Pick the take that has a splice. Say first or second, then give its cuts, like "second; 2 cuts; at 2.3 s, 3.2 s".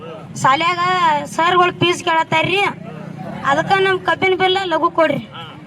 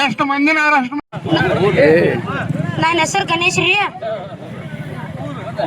second; 1 cut; at 1.0 s